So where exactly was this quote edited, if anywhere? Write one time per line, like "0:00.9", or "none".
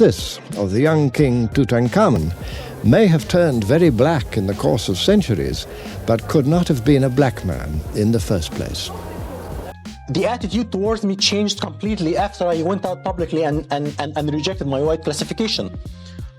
0:09.7